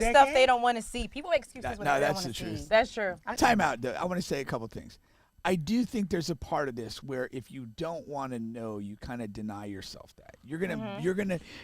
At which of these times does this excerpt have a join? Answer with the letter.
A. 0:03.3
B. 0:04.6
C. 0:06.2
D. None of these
A